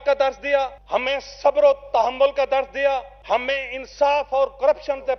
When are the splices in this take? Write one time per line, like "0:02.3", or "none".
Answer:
none

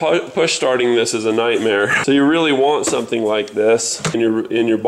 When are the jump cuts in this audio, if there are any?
none

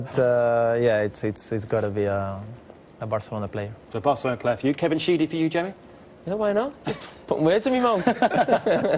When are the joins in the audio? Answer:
0:05.0

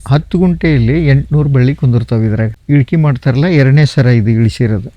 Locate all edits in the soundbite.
0:02.5

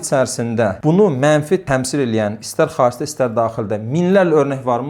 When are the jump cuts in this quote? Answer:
none

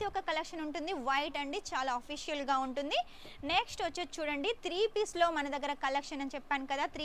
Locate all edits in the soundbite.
none

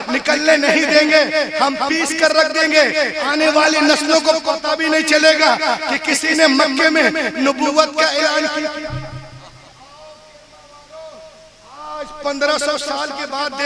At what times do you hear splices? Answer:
none

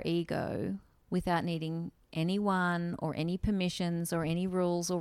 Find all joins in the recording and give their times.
none

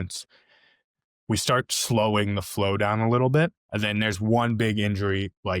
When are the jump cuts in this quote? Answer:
0:03.7

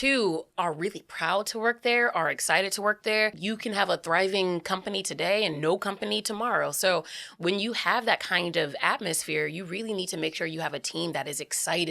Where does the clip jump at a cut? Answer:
0:03.4

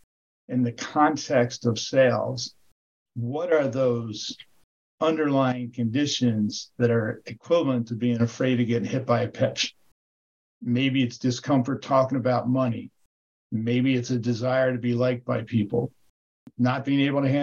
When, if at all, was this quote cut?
0:16.5

